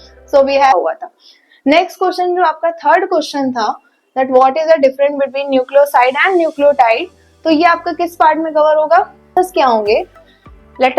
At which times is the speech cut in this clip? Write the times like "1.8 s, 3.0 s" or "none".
0.7 s, 9.3 s